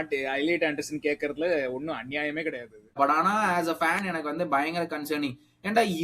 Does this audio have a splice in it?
yes; 1 cut; at 3.0 s

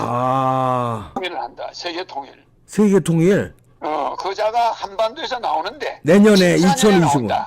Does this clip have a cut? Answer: yes; 1 cut; at 1.2 s

